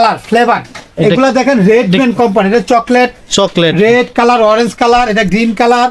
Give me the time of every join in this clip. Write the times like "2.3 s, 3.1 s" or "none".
none